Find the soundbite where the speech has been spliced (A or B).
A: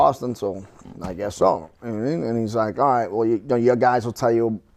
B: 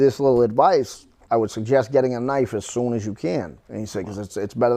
B